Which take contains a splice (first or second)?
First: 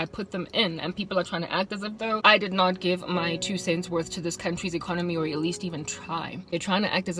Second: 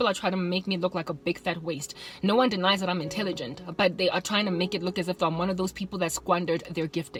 first